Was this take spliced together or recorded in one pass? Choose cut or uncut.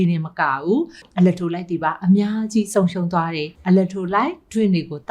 cut